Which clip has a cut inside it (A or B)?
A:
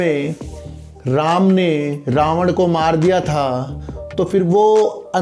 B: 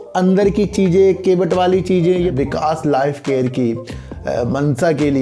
B